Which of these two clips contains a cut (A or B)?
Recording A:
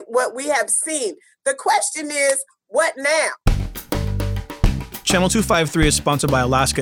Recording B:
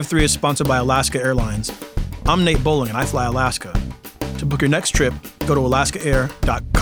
A